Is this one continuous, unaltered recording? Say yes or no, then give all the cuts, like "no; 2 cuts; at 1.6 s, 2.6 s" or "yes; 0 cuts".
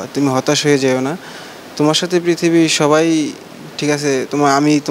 yes; 0 cuts